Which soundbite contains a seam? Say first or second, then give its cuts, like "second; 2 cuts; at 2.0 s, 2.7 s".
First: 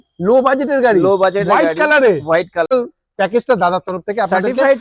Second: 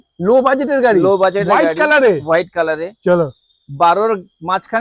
first; 1 cut; at 2.7 s